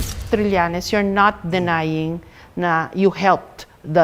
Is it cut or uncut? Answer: uncut